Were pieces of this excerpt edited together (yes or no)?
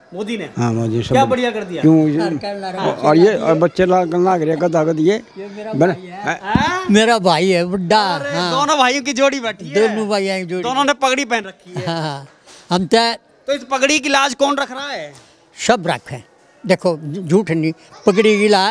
no